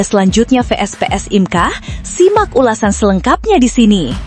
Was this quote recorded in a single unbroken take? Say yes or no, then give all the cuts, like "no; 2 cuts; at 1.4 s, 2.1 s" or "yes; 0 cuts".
yes; 0 cuts